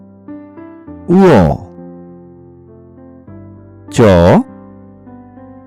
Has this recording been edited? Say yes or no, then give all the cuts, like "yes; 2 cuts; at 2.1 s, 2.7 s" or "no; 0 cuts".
no; 0 cuts